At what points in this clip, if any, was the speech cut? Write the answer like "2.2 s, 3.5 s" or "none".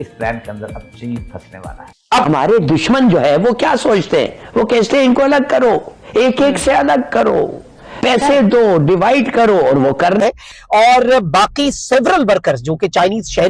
2.3 s, 10.2 s